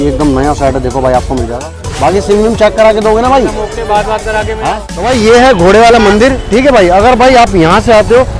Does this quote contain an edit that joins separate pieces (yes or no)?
yes